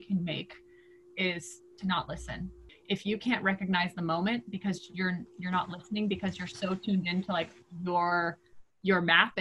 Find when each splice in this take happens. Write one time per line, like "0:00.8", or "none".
0:02.7